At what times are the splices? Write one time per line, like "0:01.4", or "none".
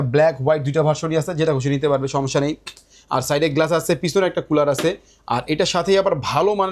none